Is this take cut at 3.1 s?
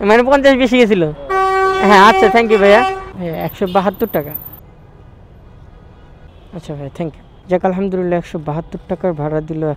yes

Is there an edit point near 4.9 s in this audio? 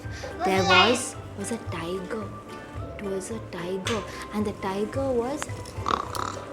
no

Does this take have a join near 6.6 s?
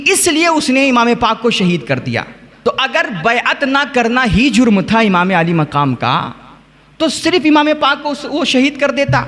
no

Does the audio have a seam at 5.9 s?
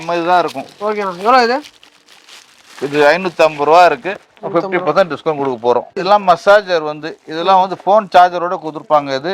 yes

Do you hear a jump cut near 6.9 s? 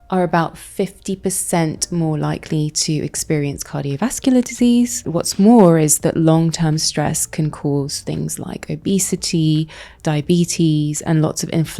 no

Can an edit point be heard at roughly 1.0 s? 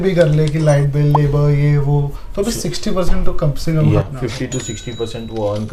no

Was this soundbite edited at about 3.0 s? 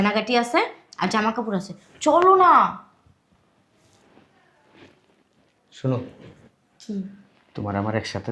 no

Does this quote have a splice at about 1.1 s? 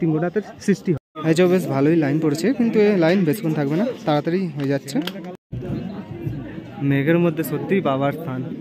yes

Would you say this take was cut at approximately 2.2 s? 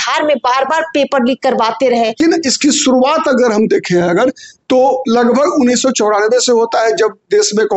yes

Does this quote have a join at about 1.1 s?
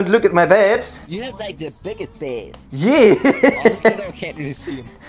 yes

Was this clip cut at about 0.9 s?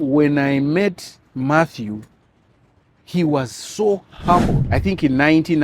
no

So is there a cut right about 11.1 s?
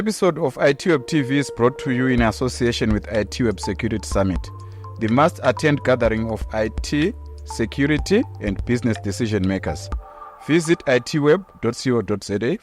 no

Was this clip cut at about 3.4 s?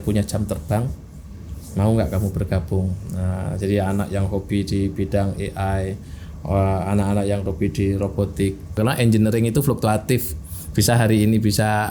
no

